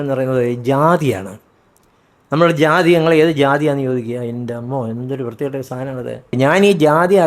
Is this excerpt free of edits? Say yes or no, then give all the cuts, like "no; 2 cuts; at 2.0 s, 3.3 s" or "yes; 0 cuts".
no; 1 cut; at 6.3 s